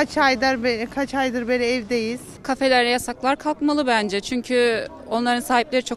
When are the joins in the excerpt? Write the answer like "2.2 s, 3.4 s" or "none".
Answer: 2.3 s